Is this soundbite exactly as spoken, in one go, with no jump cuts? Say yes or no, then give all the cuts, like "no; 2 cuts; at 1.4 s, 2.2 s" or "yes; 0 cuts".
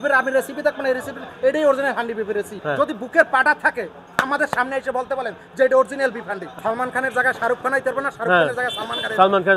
no; 2 cuts; at 2.6 s, 6.4 s